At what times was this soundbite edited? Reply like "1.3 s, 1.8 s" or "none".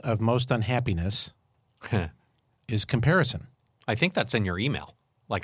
none